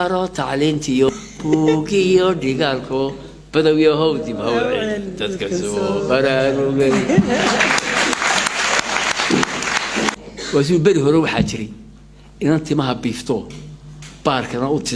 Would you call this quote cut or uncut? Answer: cut